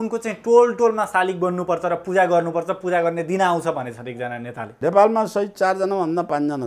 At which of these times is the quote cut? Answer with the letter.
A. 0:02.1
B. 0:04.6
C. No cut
B